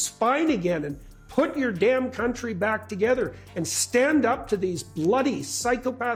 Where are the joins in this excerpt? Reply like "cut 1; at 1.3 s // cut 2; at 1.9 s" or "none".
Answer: none